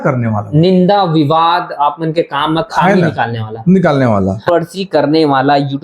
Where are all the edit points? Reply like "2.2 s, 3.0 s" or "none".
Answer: 4.4 s